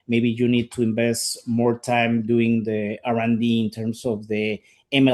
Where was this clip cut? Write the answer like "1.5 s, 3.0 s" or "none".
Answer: none

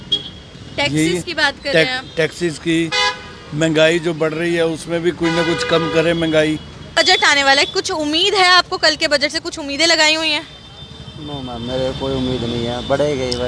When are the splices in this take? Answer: 7.3 s

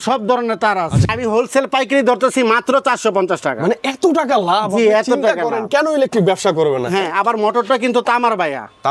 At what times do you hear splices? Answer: 1.1 s

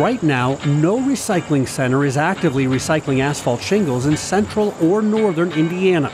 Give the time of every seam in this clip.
none

